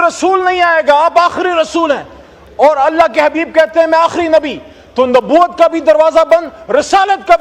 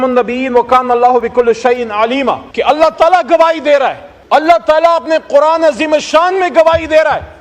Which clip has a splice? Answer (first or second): second